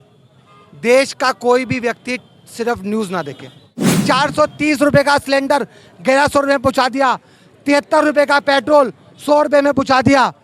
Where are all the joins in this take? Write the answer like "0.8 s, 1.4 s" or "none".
4.0 s